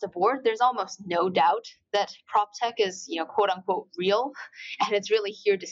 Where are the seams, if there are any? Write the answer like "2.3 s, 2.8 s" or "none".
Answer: none